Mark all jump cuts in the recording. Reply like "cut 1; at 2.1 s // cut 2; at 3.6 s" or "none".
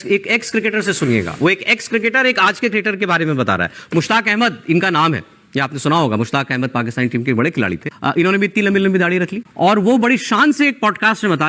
none